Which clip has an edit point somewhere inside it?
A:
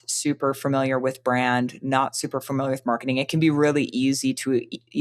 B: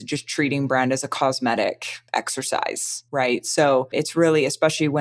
B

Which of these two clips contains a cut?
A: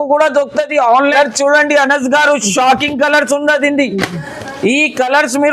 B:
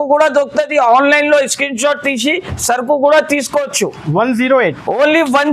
A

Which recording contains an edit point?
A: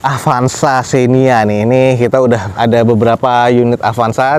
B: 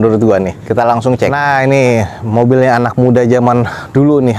B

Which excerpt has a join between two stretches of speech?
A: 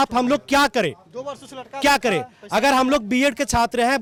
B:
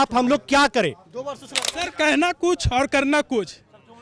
B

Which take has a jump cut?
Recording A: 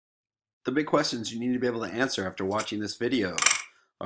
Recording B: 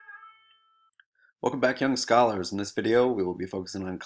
A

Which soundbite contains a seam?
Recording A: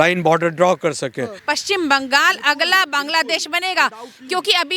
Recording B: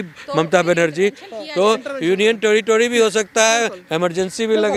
A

